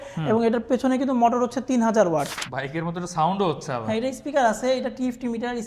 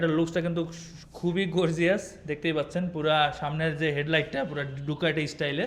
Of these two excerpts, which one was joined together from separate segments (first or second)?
first